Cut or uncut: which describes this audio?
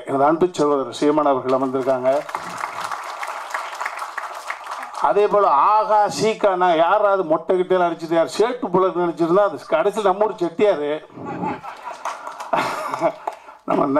uncut